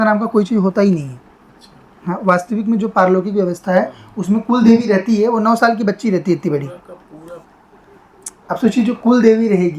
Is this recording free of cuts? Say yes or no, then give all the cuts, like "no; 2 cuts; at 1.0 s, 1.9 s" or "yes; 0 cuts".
no; 1 cut; at 7.5 s